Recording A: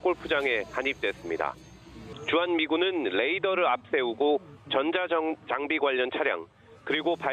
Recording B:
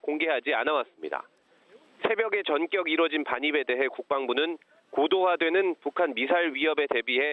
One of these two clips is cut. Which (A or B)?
B